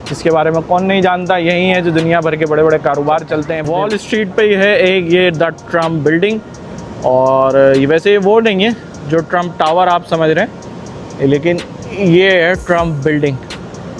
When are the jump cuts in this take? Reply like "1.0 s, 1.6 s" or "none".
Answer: 3.6 s